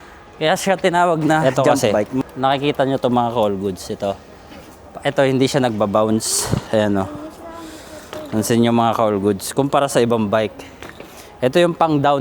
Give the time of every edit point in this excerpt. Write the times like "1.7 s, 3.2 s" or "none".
1.4 s